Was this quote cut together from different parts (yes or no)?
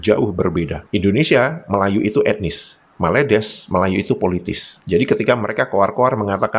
no